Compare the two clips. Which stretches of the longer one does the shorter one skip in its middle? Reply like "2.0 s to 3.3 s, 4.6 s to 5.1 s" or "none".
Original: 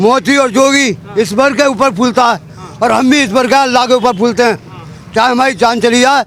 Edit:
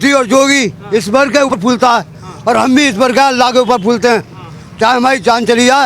1.8 s to 1.9 s